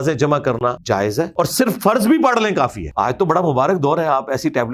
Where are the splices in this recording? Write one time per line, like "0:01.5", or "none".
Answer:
0:00.9
0:02.8